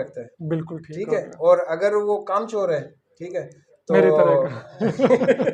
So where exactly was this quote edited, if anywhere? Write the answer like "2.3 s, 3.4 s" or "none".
none